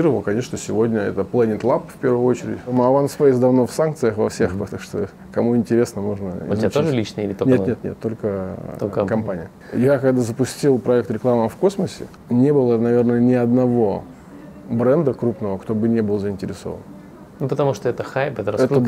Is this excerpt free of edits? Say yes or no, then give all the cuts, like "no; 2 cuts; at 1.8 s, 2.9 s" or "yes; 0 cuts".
no; 2 cuts; at 2.7 s, 9.6 s